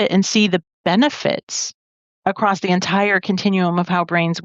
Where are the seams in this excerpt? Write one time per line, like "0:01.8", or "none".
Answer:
none